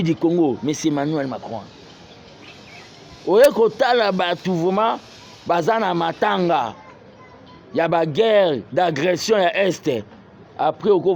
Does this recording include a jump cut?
no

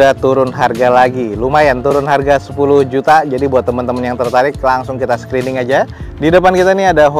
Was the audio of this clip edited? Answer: no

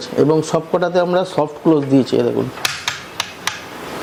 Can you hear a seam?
no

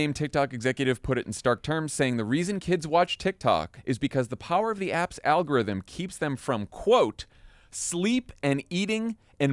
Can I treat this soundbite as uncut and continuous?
no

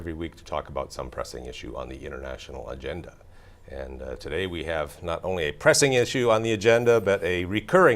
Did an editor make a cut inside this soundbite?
yes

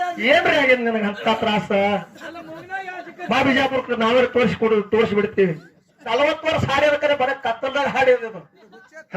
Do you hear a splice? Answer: yes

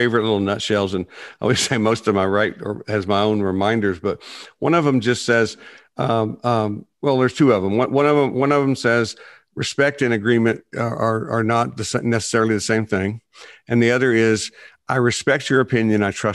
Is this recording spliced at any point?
no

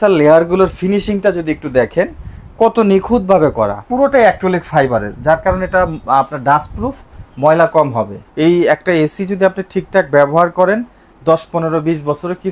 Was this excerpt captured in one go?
no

